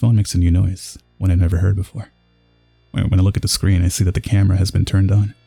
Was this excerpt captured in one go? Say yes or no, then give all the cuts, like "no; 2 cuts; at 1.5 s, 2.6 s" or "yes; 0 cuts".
yes; 0 cuts